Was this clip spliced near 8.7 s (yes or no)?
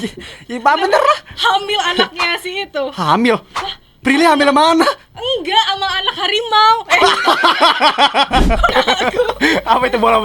yes